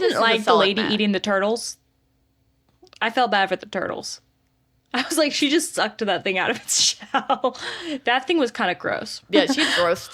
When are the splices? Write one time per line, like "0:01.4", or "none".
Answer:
0:09.1